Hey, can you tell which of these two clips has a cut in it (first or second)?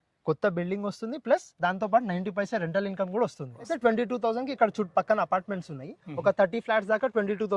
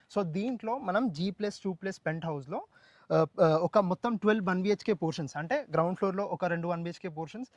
first